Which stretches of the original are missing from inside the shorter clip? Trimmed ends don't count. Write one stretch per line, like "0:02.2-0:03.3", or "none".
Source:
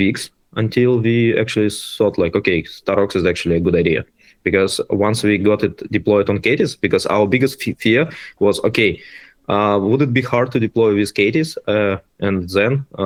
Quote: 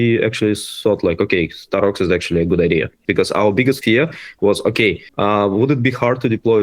0:04.1-0:06.7
0:07.5-0:07.8
0:09.0-0:09.4